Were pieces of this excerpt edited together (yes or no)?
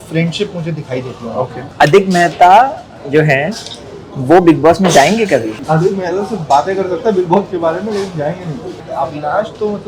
yes